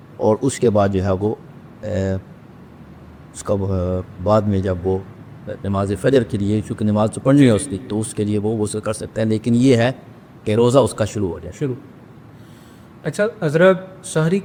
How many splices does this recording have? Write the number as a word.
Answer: zero